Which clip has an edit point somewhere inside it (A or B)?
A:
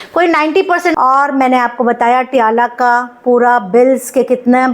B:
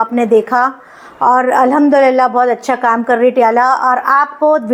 A